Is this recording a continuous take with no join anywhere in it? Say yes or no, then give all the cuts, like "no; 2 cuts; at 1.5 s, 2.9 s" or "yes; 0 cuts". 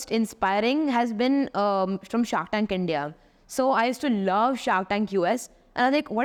yes; 0 cuts